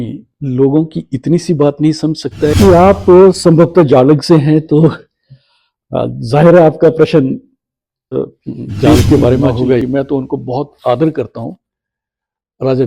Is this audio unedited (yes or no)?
no